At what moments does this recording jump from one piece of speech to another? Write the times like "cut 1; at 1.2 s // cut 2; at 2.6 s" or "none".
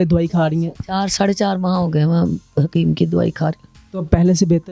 none